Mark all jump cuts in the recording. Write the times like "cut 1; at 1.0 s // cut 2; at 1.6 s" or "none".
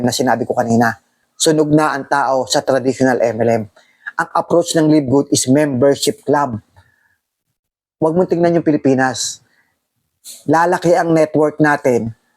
cut 1; at 1.2 s